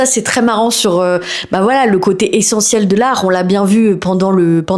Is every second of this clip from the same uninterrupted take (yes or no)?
yes